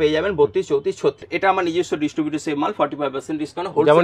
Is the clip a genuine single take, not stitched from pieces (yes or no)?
no